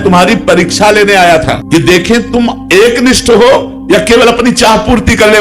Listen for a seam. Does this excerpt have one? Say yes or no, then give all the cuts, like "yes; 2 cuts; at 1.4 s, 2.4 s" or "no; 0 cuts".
yes; 1 cut; at 1.6 s